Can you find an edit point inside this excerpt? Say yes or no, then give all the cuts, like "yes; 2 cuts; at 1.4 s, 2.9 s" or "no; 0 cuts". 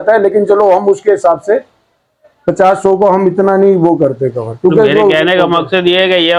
no; 0 cuts